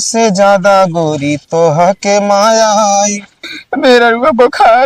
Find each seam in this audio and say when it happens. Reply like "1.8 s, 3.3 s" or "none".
3.5 s